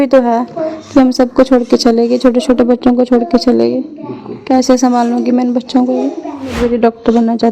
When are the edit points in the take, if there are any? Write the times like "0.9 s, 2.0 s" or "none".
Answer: 6.5 s